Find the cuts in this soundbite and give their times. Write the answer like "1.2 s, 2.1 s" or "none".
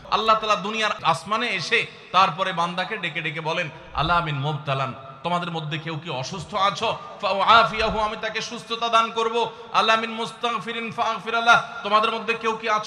1.0 s